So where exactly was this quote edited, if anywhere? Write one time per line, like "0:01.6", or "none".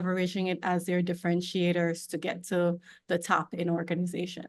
none